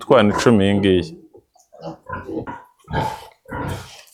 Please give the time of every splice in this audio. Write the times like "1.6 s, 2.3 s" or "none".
2.5 s